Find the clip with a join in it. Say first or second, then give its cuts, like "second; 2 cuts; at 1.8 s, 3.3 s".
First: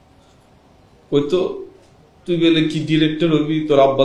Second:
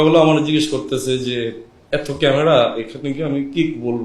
second; 1 cut; at 1.7 s